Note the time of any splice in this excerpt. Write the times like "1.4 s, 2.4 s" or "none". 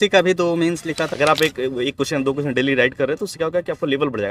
1.1 s

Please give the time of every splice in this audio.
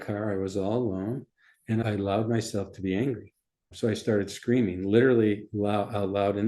1.8 s, 3.6 s

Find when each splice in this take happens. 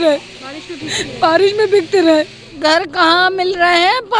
2.4 s

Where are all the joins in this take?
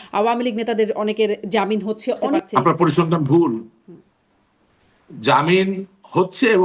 2.4 s

